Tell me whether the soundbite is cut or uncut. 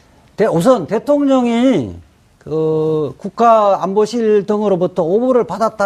uncut